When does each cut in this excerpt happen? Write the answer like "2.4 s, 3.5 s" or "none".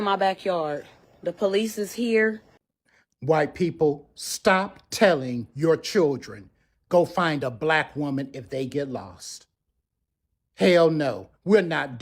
2.7 s